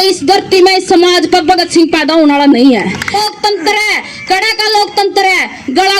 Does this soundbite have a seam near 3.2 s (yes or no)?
yes